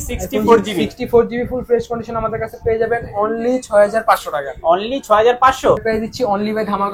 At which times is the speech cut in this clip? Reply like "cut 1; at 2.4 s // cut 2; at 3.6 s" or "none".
cut 1; at 5.8 s